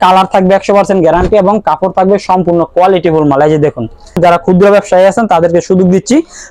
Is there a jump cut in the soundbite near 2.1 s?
no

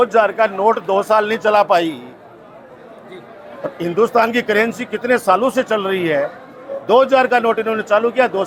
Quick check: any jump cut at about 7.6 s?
no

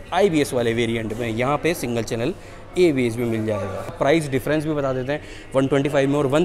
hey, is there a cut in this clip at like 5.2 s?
no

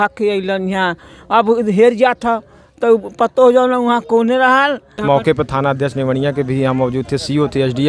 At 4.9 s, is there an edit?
yes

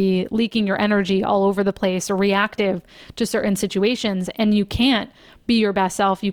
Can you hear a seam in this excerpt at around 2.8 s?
no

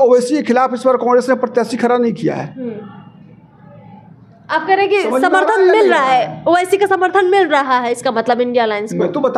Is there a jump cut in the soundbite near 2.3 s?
no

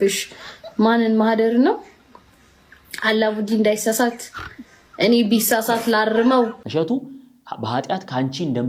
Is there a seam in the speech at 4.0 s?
no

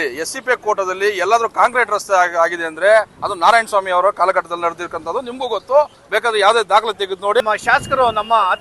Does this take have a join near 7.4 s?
yes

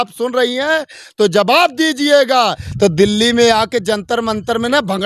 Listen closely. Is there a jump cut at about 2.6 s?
yes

